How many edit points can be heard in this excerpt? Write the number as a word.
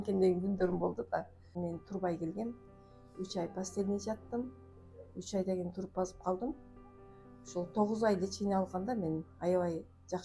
one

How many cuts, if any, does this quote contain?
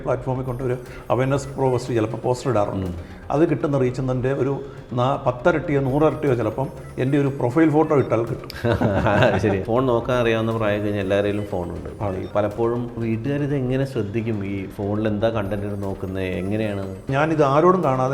three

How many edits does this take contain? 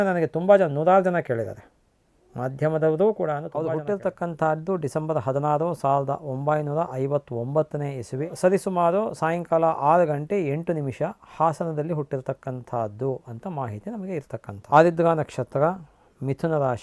three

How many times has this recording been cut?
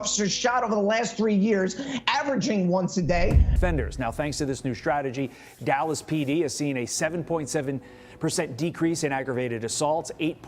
one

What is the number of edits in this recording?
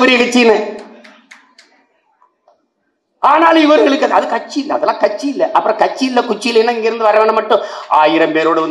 zero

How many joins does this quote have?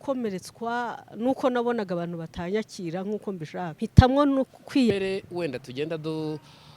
two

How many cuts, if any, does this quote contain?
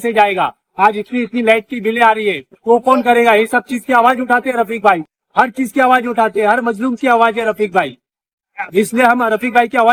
zero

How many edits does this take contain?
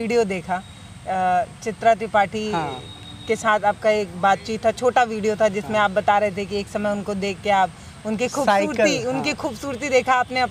zero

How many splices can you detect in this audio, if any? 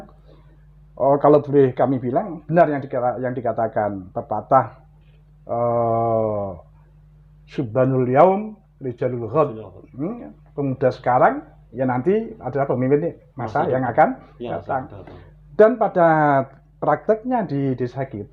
zero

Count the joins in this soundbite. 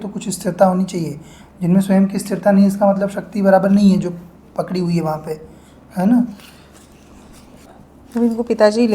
one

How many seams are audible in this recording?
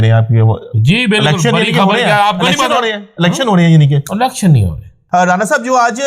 one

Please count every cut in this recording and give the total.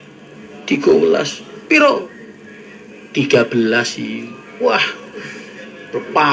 zero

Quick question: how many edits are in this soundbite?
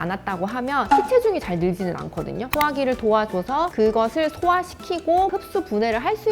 four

